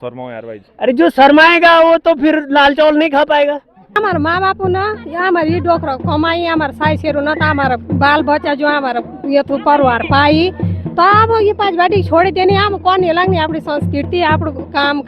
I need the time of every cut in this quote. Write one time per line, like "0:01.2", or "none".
0:03.8